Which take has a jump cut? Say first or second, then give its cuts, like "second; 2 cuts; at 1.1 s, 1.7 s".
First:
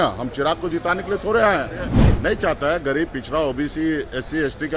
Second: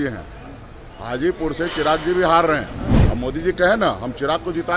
first; 1 cut; at 2.0 s